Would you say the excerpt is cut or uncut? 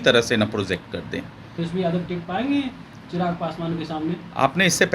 cut